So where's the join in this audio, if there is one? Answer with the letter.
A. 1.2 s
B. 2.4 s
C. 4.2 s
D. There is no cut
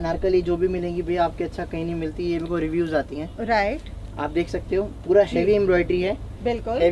D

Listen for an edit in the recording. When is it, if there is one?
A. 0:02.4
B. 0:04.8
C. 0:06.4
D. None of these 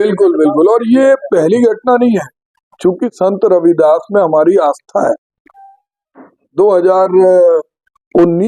D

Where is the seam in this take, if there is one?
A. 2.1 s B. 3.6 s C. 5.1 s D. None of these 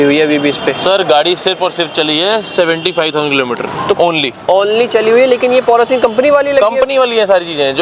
D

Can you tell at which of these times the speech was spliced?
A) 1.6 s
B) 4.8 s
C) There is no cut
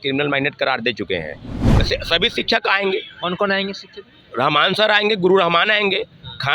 A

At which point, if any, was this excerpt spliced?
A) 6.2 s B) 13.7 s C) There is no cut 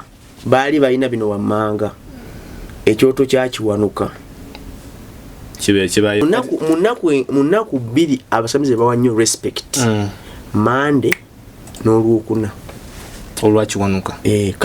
A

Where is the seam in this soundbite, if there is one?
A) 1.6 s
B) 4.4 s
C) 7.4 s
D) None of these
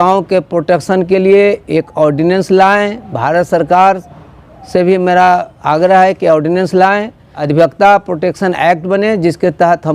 C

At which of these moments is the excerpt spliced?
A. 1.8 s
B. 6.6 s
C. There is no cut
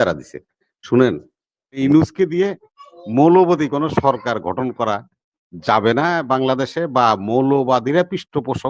A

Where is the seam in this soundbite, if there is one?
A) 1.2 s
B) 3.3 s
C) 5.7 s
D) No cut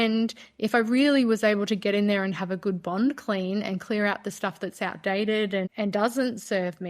C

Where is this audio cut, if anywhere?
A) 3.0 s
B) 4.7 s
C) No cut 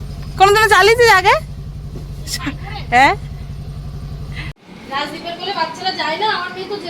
B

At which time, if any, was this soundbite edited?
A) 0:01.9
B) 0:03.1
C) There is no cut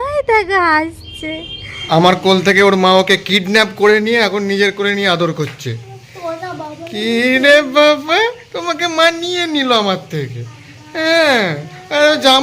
A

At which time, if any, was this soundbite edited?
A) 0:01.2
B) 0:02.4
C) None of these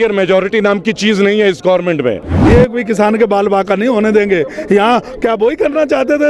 B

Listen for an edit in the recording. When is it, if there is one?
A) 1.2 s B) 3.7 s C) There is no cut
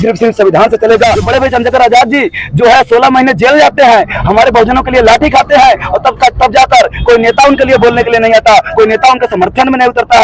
A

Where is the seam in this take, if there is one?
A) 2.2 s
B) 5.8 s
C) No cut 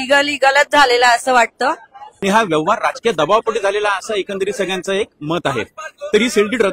A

